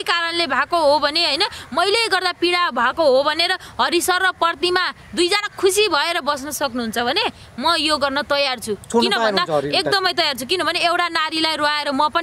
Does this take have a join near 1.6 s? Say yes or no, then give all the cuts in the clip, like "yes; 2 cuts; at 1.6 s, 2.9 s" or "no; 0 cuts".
no; 0 cuts